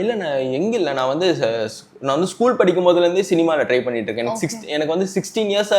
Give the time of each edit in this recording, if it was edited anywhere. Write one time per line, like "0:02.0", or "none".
none